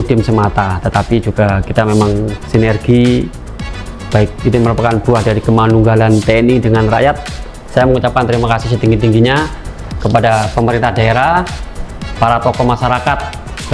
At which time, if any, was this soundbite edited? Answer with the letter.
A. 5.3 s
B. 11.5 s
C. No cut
C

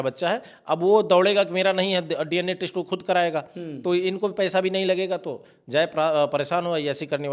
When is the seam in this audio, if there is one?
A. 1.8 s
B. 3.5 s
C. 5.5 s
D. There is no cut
D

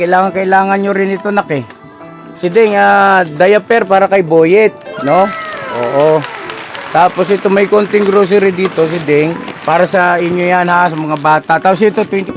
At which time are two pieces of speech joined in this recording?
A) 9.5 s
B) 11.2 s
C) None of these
A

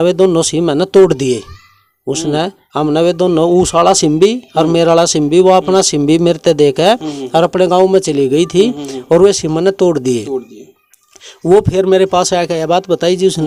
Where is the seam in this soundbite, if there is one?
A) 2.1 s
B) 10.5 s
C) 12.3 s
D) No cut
D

